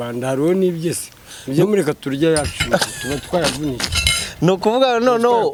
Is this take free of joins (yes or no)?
yes